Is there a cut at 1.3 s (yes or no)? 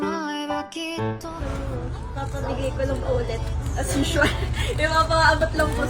yes